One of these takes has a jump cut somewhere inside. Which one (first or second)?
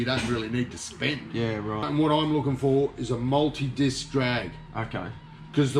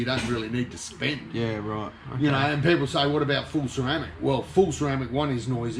first